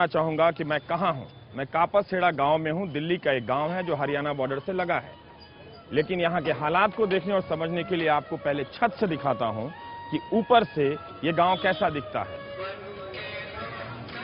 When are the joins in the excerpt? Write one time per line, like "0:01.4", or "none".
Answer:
none